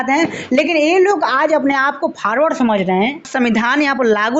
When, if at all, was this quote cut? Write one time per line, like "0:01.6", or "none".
0:03.3